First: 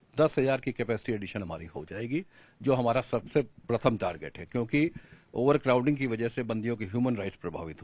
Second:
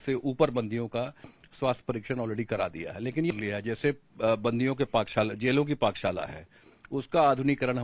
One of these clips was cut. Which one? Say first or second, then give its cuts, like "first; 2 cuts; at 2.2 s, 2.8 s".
second; 1 cut; at 3.3 s